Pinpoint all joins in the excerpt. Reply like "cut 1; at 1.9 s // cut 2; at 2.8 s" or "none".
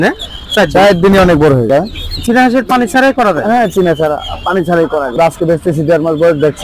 cut 1; at 1.7 s // cut 2; at 5.1 s